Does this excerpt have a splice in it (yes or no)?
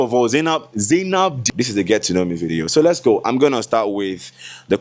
yes